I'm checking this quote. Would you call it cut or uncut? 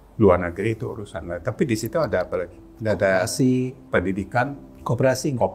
uncut